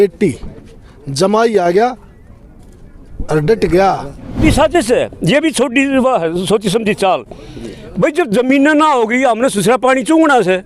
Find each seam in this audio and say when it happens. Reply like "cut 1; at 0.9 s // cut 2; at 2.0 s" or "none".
cut 1; at 4.4 s